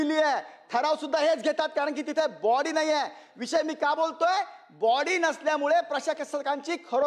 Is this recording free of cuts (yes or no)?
yes